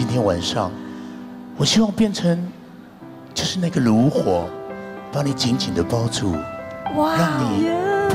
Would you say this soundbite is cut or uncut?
uncut